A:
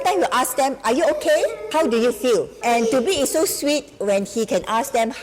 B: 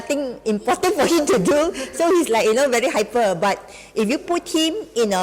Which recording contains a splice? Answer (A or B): A